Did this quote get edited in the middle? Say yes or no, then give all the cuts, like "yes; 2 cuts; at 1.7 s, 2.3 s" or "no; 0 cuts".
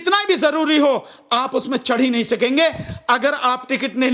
no; 0 cuts